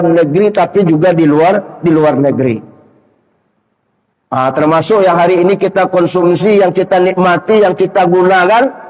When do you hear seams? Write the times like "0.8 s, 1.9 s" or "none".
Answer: none

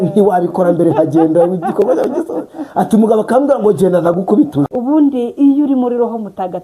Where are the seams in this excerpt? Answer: 4.7 s

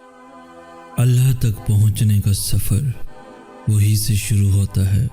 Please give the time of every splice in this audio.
1.0 s

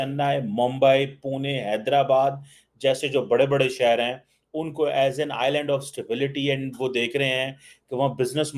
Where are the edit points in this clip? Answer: none

